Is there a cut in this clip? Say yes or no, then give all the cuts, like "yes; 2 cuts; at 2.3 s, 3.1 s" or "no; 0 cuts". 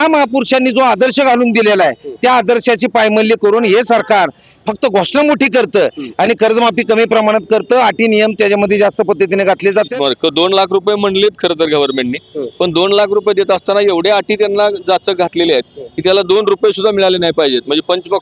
yes; 1 cut; at 9.9 s